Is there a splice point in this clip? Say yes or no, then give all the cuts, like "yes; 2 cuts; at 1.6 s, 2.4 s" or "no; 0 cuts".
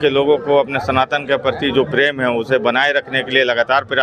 no; 0 cuts